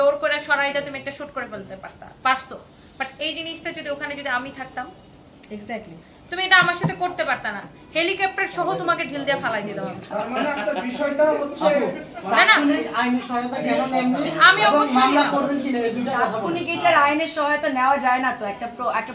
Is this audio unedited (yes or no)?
yes